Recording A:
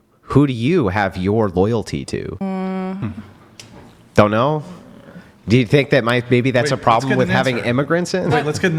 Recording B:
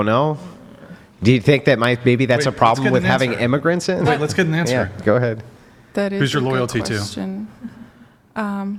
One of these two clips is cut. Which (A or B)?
A